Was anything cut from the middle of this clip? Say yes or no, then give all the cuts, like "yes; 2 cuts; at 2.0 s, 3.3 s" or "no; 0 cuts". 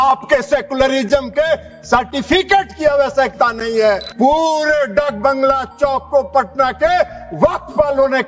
yes; 1 cut; at 4.1 s